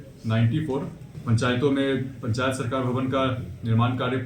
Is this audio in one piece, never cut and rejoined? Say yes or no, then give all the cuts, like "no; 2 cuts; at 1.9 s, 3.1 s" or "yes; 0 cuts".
no; 1 cut; at 1.1 s